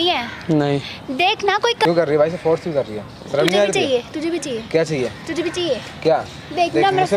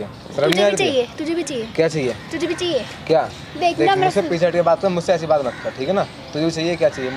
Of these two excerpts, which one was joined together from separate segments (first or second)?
first